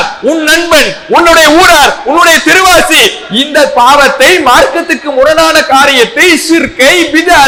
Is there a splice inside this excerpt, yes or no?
no